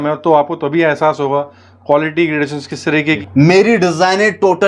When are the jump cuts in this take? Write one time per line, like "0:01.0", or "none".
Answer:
0:03.2

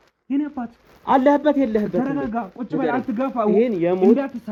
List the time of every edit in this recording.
none

